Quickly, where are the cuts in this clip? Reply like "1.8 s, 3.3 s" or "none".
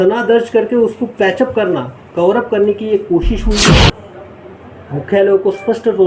3.9 s